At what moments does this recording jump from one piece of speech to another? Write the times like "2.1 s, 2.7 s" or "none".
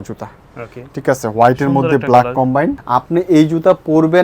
2.8 s